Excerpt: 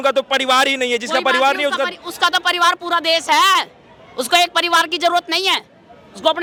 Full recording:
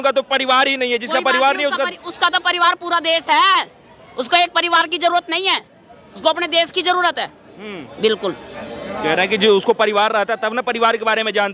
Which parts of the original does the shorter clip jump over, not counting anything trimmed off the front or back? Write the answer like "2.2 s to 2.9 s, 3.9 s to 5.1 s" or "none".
none